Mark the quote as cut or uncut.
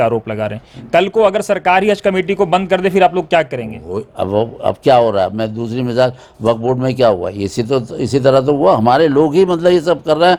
uncut